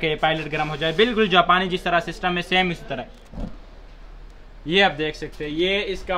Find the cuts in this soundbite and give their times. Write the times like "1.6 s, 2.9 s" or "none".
3.2 s